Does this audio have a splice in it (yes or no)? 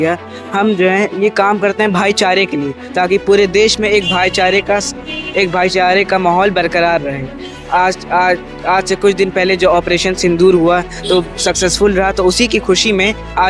no